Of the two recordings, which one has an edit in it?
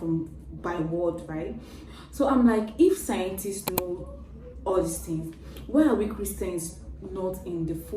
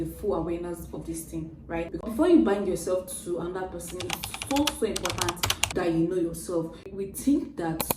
second; 2 cuts; at 1.9 s, 6.8 s

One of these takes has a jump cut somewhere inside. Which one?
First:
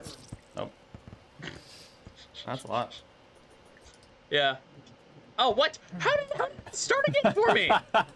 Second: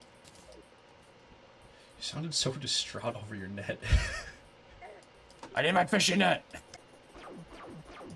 second; 1 cut; at 6.7 s

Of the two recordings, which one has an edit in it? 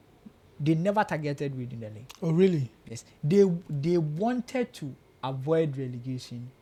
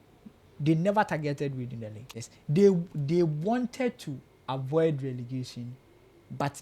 second; 1 cut; at 2.0 s

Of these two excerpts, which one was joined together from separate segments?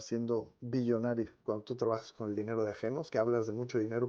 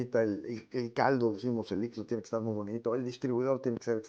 first; 2 cuts; at 1.4 s, 3.1 s

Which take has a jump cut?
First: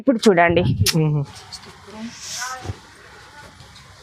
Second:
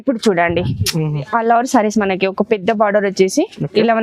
second; 1 cut; at 1.2 s

